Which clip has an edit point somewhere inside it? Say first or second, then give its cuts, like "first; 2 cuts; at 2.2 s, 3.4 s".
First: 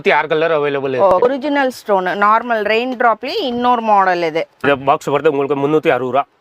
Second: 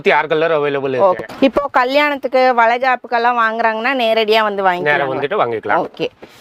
first; 2 cuts; at 1.2 s, 4.6 s